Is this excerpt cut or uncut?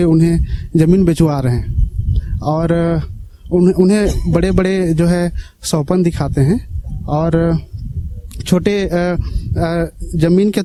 uncut